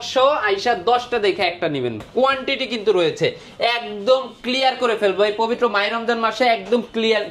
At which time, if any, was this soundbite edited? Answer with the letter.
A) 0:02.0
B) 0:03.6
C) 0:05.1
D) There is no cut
A